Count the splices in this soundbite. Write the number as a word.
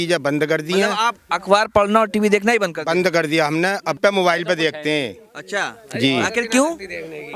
one